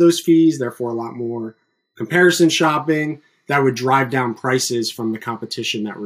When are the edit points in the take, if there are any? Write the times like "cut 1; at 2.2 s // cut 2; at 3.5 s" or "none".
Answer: none